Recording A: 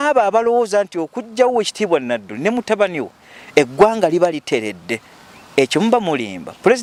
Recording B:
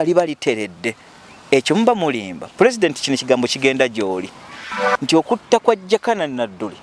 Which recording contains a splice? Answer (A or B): B